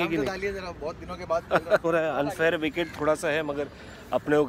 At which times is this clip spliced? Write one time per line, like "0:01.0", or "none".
0:01.8